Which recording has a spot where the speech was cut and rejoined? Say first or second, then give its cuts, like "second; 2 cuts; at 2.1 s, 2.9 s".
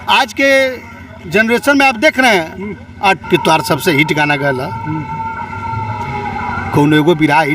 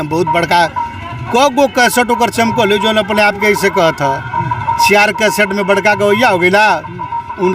first; 1 cut; at 3.2 s